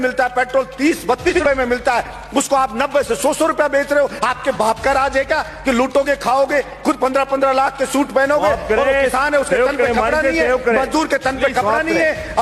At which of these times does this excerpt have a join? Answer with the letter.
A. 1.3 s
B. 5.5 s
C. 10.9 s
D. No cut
A